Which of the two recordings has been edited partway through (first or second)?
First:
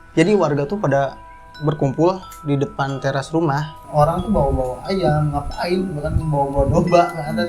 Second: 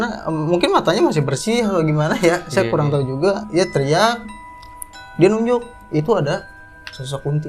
first